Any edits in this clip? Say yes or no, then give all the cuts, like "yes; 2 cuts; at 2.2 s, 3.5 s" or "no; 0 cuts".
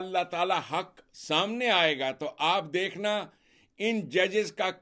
no; 0 cuts